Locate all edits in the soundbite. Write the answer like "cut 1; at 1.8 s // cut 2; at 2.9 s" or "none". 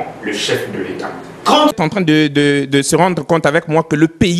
cut 1; at 1.7 s